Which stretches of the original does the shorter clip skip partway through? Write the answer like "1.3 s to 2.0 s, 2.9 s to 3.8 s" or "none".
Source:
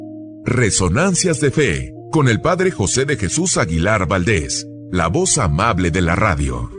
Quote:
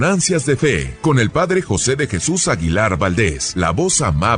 1.8 s to 2.0 s, 4.5 s to 4.8 s